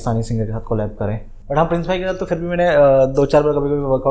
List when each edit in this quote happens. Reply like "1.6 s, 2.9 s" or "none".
1.3 s